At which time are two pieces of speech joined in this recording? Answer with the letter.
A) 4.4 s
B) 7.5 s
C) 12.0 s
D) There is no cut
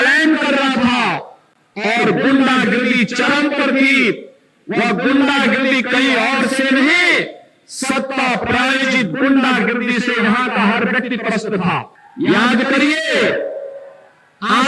C